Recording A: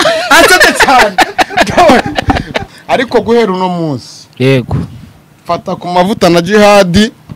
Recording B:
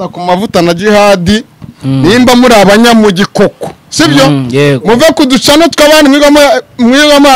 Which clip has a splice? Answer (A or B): A